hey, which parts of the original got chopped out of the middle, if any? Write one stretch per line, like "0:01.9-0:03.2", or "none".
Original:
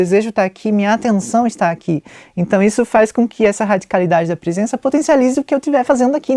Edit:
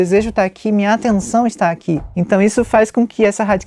0:02.1-0:02.3